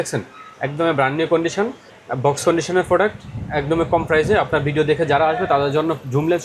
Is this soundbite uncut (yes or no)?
yes